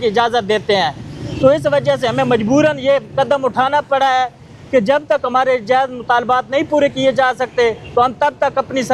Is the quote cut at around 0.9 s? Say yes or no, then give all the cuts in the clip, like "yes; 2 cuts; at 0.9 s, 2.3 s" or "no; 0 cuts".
no; 0 cuts